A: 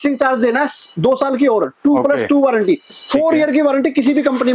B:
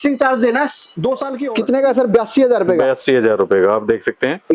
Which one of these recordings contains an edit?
B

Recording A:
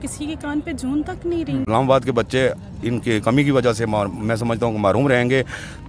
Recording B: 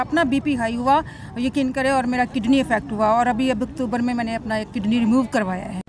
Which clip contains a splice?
A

